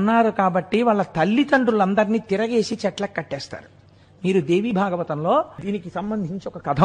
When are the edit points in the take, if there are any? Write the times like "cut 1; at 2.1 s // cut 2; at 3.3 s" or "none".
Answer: cut 1; at 5.6 s